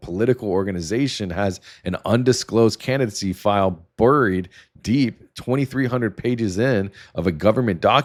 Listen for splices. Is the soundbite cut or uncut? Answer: uncut